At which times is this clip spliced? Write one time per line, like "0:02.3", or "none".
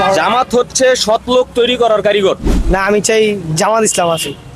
0:02.6